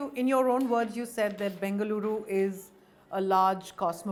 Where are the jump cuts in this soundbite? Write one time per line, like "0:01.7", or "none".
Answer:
none